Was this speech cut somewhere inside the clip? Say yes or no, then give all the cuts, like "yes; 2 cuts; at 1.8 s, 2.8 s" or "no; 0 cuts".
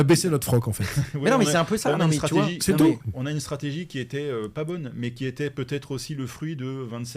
no; 0 cuts